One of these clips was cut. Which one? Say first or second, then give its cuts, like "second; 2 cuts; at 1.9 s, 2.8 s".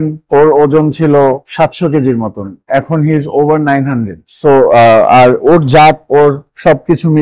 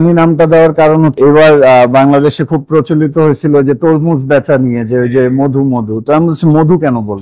second; 1 cut; at 1.1 s